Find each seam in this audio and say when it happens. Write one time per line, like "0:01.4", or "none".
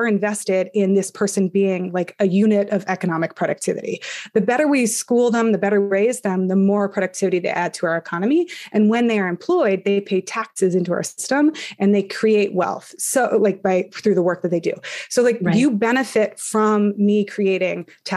none